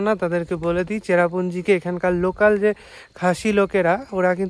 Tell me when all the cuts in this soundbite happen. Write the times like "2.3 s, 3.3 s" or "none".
none